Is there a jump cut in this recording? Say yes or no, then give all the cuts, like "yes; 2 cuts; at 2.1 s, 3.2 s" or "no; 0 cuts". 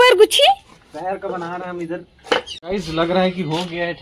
yes; 1 cut; at 2.5 s